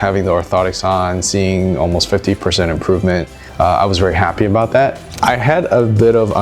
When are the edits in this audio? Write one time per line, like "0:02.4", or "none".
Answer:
0:03.4
0:05.1